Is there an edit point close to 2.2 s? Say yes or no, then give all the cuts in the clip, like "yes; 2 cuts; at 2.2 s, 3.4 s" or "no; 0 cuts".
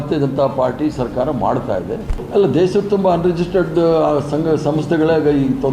yes; 1 cut; at 2.2 s